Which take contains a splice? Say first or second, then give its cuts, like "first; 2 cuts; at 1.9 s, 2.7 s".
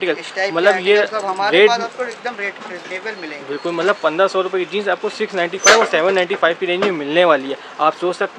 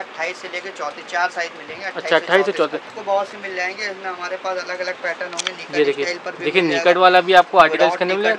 second; 1 cut; at 2.9 s